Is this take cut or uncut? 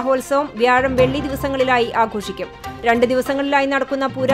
uncut